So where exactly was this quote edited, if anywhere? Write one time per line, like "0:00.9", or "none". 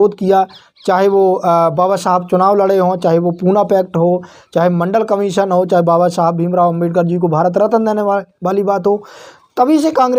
none